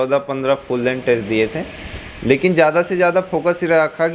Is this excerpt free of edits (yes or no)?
yes